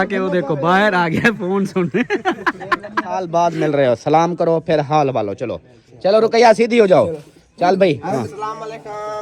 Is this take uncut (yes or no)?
no